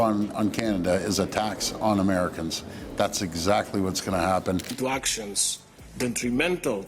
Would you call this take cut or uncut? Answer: cut